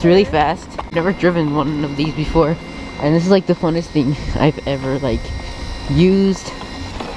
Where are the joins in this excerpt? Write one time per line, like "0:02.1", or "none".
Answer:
0:00.9